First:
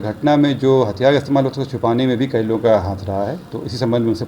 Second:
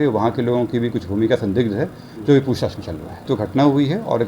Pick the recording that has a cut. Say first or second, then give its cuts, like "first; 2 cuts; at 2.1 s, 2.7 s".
second; 1 cut; at 3.2 s